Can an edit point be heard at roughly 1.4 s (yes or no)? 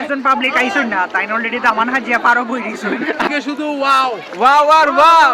no